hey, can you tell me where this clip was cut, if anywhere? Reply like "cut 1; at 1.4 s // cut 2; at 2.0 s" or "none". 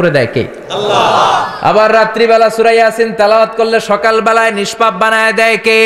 none